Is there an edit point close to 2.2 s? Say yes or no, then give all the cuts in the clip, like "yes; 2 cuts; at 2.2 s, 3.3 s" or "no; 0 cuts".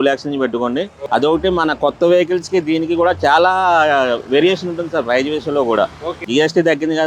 no; 2 cuts; at 1.0 s, 6.3 s